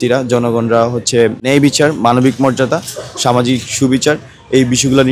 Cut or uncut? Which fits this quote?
cut